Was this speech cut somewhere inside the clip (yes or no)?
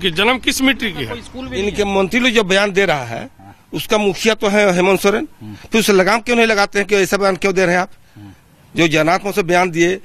yes